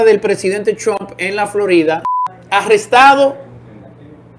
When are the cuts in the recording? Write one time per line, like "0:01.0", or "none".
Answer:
0:02.1